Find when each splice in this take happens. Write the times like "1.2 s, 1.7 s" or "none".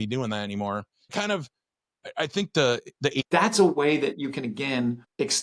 1.1 s, 3.2 s